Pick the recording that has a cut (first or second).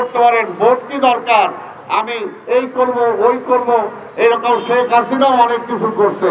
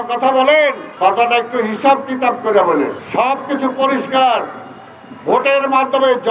second